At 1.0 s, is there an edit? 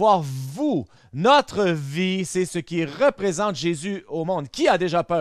yes; 1 cut; at 1.0 s

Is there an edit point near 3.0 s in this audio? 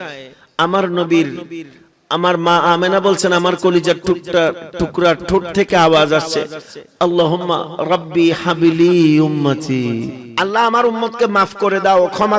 no; 1 cut; at 10.2 s

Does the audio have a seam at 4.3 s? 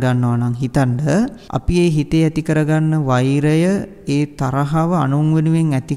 no; 1 cut; at 1.5 s

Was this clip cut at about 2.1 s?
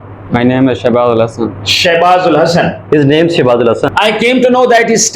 no; 1 cut; at 3.8 s

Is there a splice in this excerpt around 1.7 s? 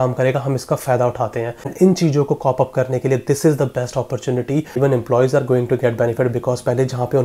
yes; 2 cuts; at 1.7 s, 4.8 s

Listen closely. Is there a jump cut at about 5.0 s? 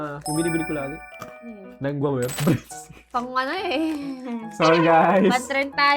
no; 1 cut; at 2.3 s

